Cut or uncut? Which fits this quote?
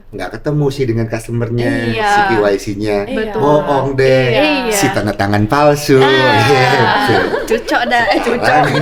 uncut